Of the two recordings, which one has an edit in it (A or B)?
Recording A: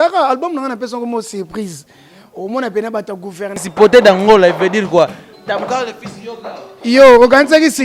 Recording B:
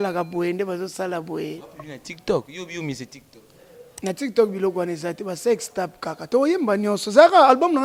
A